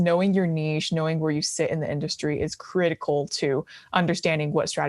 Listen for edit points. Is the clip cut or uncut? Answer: uncut